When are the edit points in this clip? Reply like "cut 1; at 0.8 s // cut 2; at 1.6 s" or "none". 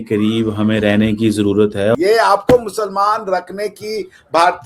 cut 1; at 2.0 s